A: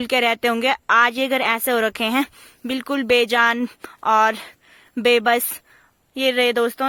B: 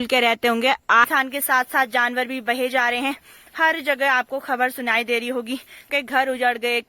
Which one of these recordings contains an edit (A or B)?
B